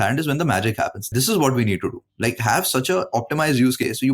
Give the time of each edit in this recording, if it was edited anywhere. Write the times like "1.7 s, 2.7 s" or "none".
1.1 s